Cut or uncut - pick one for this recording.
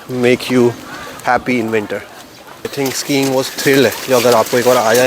cut